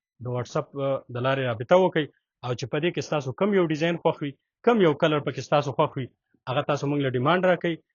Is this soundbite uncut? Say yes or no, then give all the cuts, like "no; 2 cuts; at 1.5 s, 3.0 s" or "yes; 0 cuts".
yes; 0 cuts